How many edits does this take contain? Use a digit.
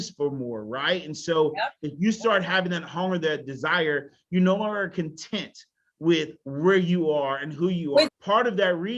1